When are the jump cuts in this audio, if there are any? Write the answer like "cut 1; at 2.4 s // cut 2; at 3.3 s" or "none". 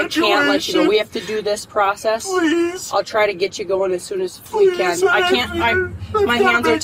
none